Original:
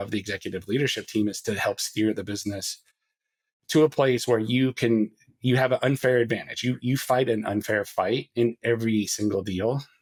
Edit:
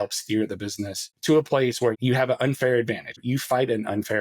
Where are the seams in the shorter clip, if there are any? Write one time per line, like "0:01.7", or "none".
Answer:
0:01.1
0:02.0
0:03.2